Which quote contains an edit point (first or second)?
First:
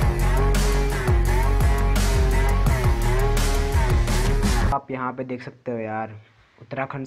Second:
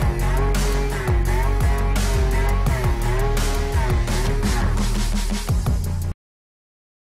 first